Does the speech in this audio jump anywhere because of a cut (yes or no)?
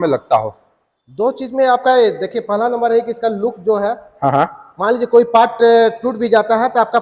no